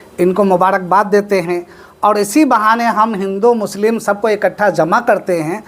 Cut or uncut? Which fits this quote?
uncut